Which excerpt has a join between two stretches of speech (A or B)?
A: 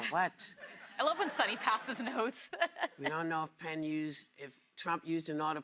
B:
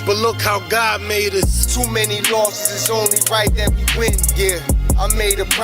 A